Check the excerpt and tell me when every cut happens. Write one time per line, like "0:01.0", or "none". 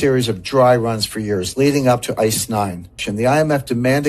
0:03.1